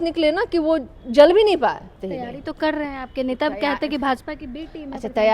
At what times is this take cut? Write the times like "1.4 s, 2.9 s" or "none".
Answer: 2.0 s